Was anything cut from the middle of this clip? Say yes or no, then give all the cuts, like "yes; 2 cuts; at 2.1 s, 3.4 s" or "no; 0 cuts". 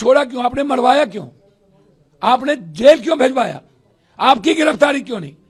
no; 0 cuts